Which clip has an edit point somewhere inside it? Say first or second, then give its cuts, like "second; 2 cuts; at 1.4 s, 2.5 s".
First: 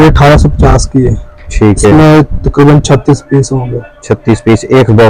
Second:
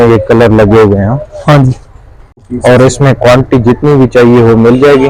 second; 1 cut; at 2.5 s